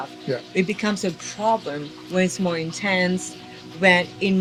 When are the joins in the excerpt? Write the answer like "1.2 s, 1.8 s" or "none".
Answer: none